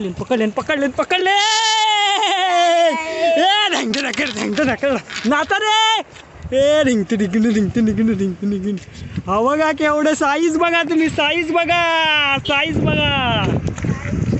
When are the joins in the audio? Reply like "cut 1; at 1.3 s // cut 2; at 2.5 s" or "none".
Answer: none